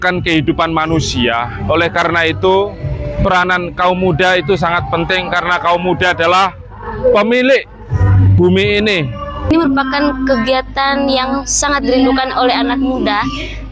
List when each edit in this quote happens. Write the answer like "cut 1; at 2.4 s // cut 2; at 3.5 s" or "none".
cut 1; at 9.5 s